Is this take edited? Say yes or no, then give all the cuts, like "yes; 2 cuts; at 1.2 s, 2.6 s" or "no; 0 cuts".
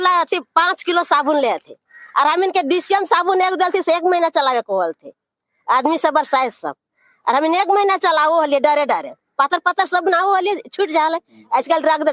no; 0 cuts